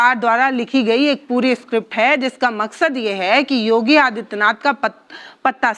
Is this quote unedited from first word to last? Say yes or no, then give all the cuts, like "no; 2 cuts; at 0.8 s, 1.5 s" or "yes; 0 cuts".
yes; 0 cuts